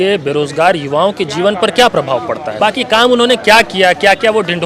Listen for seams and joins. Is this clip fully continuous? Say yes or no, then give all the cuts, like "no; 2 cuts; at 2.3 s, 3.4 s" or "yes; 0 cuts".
no; 1 cut; at 2.5 s